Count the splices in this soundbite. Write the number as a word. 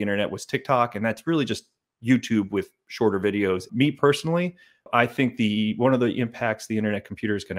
two